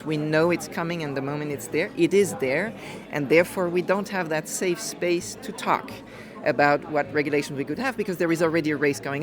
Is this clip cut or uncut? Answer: uncut